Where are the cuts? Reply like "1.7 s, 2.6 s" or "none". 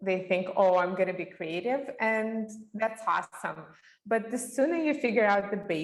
none